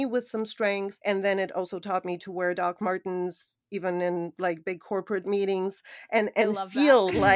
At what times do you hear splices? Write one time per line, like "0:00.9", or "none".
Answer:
0:00.9